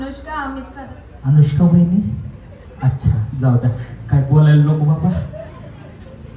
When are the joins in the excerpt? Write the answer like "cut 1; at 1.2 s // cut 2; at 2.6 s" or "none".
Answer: none

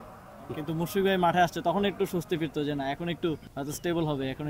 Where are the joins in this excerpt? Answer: cut 1; at 3.5 s

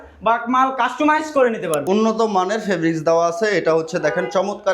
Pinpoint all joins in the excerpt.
cut 1; at 1.8 s

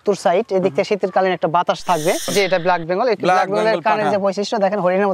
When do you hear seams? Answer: cut 1; at 2.3 s

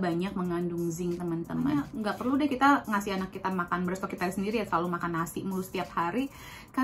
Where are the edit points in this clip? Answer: cut 1; at 1.9 s

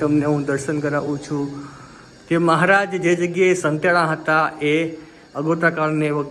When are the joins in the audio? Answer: none

